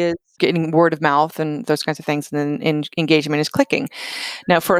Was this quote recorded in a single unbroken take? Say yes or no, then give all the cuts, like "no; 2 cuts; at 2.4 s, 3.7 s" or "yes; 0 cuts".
yes; 0 cuts